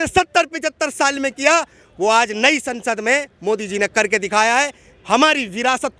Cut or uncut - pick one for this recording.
uncut